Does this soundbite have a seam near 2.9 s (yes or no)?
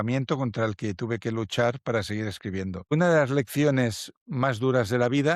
yes